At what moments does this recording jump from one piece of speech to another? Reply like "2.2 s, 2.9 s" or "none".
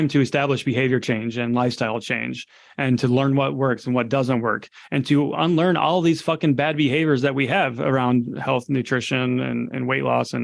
none